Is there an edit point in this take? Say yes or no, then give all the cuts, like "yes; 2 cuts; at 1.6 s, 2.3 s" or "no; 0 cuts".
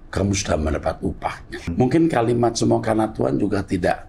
yes; 1 cut; at 1.7 s